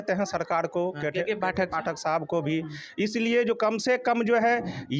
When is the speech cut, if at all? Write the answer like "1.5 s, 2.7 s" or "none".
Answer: none